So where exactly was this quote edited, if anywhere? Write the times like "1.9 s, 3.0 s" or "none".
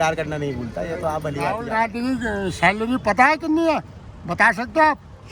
1.6 s